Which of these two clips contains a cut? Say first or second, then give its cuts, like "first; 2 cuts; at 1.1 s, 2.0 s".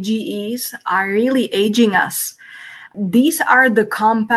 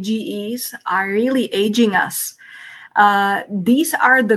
first; 1 cut; at 2.9 s